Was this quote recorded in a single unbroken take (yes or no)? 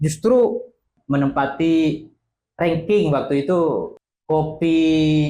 no